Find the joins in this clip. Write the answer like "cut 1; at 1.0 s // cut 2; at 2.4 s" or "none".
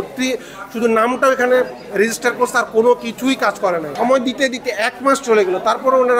cut 1; at 3.9 s